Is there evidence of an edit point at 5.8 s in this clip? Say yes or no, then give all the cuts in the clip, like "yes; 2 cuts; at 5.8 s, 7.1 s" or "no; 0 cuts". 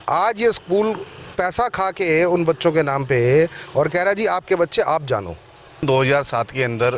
yes; 1 cut; at 5.8 s